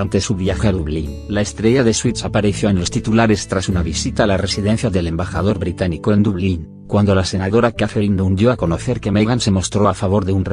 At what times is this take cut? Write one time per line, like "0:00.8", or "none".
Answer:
0:02.8